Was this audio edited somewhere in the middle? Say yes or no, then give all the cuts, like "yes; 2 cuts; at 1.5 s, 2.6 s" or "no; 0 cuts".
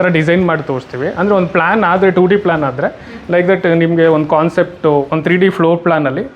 no; 0 cuts